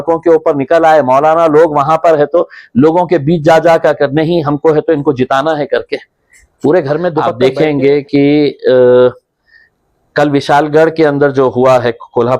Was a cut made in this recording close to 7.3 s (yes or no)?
yes